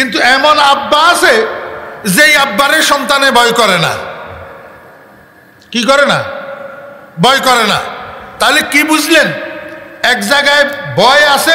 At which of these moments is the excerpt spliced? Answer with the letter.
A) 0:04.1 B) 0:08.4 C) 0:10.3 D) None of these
D